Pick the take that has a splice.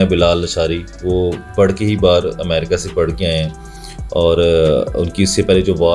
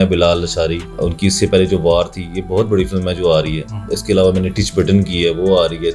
second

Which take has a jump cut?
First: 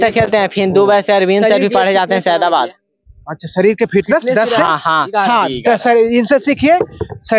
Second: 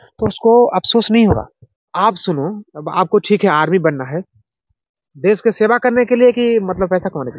second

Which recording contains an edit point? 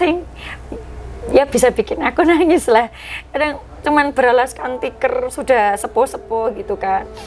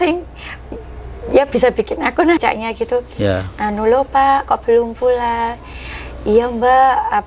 second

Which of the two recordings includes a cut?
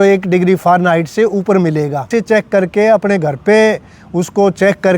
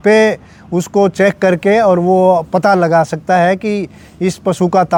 first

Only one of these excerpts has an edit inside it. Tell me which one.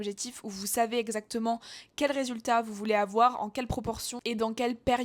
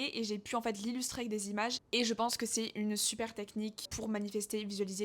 second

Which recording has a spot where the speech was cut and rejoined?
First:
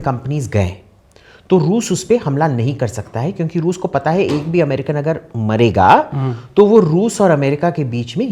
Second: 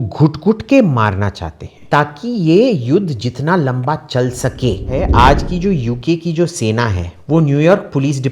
second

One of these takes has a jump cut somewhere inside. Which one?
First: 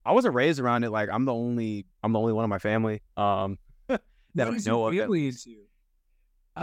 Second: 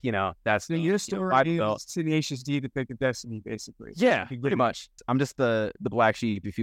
second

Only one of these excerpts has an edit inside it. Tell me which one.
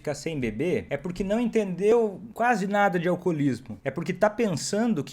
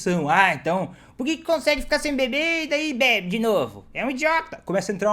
first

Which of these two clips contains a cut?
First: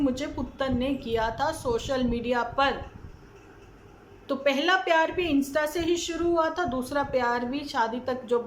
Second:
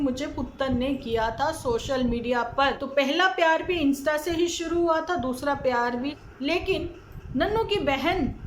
second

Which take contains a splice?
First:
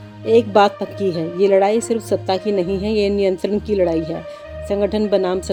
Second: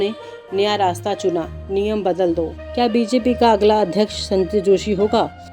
second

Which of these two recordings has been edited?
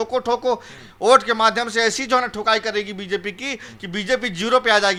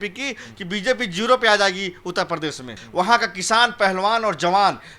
second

